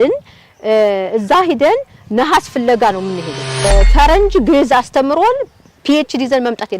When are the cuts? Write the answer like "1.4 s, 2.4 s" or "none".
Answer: 3.7 s